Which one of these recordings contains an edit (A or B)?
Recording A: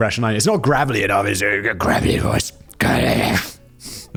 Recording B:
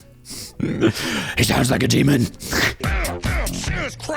B